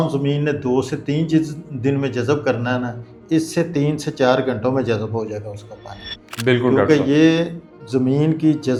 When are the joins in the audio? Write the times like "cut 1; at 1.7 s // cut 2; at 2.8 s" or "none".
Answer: none